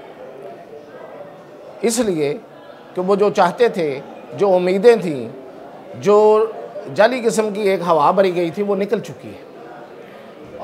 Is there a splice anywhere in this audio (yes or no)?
no